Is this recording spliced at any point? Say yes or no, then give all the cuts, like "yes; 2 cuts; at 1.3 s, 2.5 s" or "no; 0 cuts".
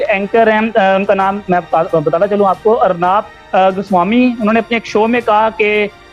no; 0 cuts